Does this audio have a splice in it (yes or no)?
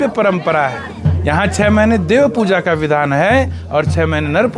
no